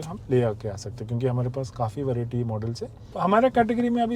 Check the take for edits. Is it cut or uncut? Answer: cut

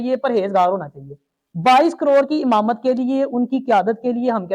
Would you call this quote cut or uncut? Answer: uncut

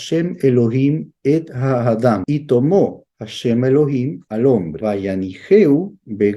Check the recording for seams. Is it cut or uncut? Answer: cut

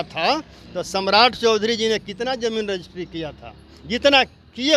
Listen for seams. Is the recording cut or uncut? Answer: uncut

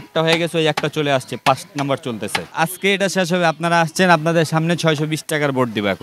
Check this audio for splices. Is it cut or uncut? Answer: cut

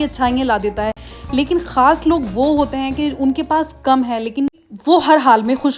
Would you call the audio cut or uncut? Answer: cut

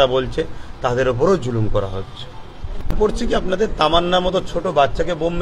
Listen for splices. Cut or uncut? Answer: cut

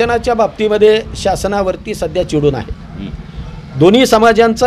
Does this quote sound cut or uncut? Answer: uncut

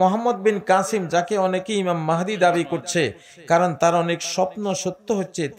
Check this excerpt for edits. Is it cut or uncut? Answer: uncut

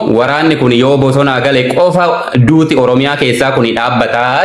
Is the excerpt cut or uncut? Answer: uncut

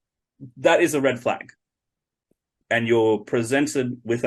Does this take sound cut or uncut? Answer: cut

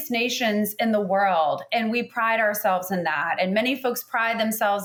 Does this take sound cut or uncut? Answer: uncut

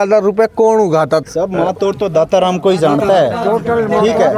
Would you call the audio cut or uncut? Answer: cut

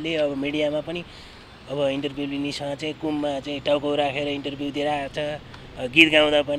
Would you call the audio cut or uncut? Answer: uncut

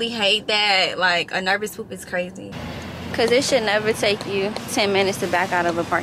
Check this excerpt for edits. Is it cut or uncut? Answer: cut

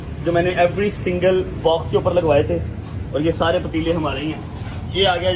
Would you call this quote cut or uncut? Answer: uncut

